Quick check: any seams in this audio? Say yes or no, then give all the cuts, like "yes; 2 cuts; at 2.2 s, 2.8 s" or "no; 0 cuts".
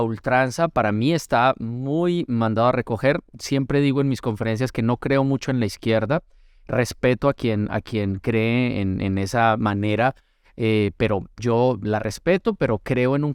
no; 0 cuts